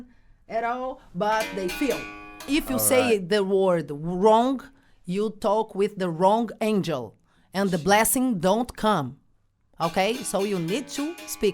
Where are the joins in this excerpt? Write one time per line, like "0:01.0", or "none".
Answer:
0:02.5